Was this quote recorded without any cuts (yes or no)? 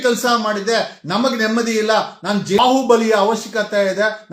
no